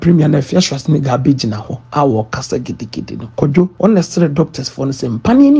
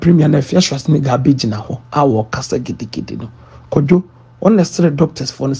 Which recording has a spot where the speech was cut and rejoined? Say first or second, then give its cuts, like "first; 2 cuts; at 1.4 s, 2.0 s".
first; 1 cut; at 3.6 s